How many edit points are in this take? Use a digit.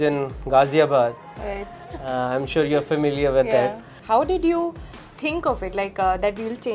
0